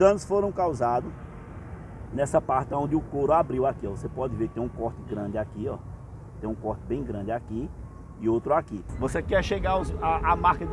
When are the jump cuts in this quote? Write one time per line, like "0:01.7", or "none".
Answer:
0:08.8